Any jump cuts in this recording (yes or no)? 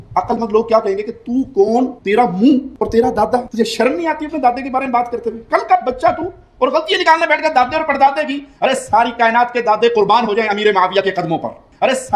no